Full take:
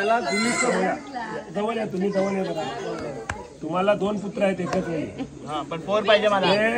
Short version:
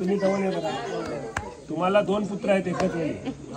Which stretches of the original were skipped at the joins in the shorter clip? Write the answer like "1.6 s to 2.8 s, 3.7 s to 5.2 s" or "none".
none